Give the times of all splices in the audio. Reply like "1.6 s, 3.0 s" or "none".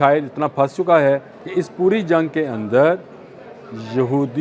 1.4 s

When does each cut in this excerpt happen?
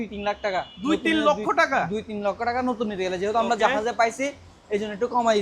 none

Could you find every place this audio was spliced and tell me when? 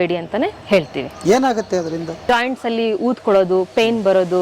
2.2 s

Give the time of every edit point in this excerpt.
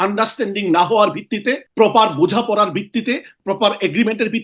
1.7 s, 3.3 s

